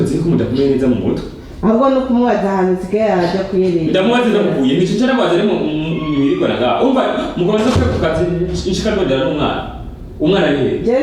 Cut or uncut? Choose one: uncut